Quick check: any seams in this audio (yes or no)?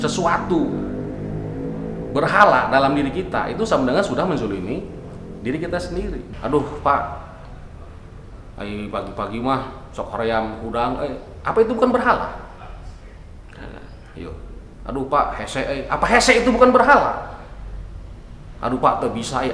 yes